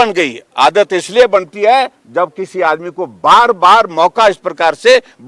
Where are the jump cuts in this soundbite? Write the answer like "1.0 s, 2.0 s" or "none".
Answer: none